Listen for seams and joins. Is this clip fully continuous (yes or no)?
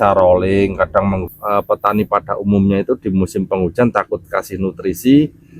no